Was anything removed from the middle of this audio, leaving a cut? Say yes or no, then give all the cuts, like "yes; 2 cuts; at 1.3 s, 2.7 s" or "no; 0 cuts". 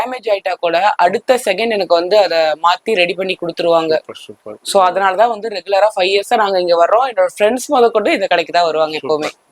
no; 0 cuts